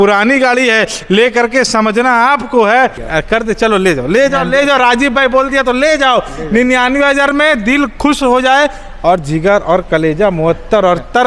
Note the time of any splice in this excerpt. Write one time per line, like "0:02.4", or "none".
0:03.0